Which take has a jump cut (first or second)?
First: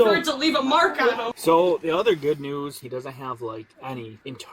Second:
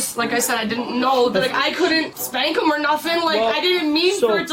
first